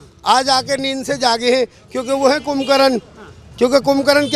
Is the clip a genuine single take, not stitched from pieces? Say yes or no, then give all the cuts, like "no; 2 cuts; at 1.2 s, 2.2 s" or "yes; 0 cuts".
yes; 0 cuts